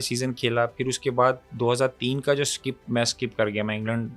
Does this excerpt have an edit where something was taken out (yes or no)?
no